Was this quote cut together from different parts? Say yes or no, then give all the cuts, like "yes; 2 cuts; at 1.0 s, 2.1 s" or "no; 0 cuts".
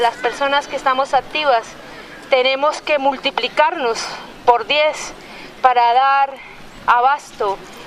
yes; 1 cut; at 3.5 s